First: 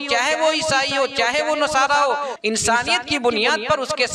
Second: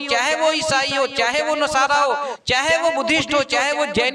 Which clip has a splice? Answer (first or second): first